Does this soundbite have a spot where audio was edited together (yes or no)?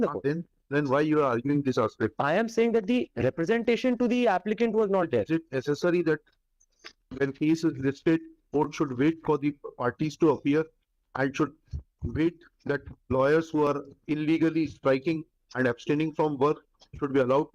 no